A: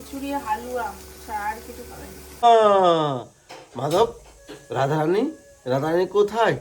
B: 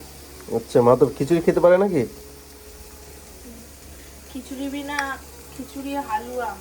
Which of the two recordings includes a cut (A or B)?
A